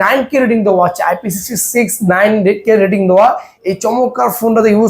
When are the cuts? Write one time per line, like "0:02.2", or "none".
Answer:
none